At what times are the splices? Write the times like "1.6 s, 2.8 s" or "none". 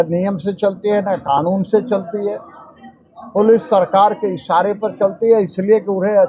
none